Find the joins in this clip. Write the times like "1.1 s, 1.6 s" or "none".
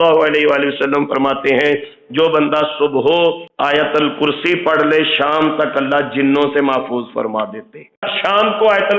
3.5 s, 8.1 s